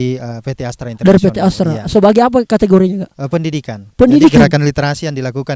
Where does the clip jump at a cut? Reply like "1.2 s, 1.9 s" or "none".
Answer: none